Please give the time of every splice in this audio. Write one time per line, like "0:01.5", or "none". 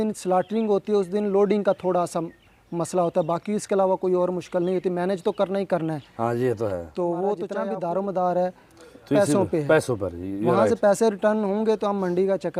0:07.5